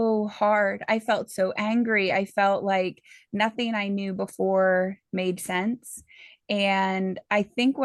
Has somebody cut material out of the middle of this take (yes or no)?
no